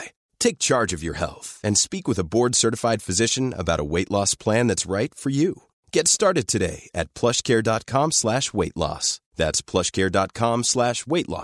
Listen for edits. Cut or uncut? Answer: uncut